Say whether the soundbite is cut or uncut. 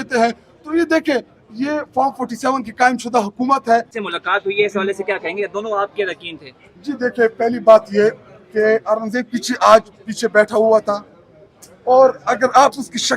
cut